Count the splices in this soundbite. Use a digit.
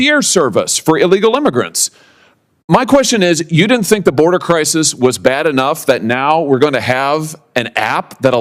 0